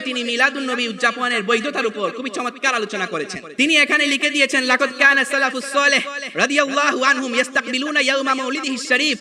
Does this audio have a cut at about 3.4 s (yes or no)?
yes